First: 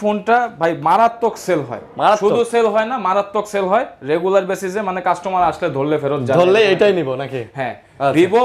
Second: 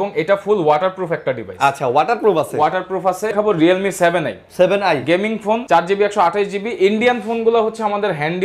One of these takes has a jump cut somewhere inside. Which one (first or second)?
second